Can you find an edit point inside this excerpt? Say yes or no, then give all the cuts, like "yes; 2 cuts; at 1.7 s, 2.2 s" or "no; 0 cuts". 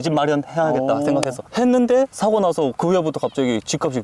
yes; 2 cuts; at 1.4 s, 2.8 s